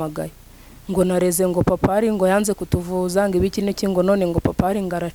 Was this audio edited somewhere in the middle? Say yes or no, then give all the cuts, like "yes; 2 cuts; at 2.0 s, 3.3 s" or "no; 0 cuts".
no; 0 cuts